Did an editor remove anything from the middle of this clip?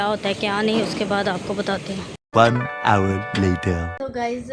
no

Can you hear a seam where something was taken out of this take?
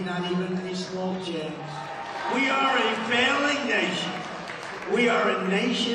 yes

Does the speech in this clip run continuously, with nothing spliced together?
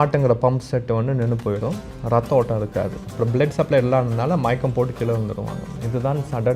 no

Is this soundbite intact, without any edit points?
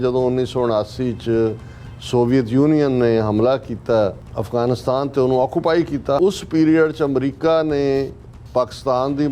no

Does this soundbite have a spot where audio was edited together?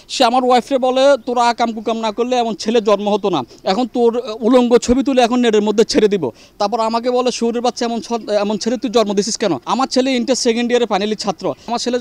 no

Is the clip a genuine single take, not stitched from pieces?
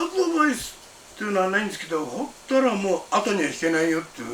yes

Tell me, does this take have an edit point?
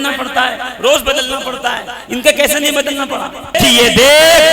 yes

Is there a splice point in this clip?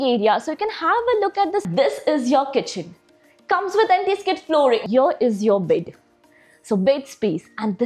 yes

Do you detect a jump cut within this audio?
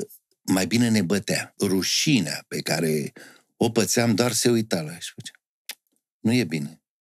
yes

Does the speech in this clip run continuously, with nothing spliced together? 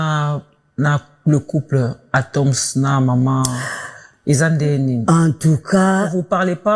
yes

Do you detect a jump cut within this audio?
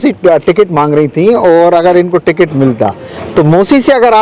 no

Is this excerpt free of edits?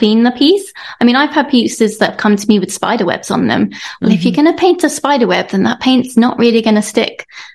yes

